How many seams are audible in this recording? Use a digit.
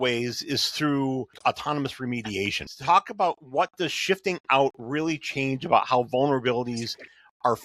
2